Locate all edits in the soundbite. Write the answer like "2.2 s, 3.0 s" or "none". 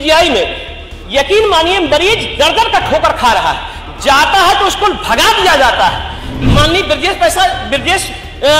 6.4 s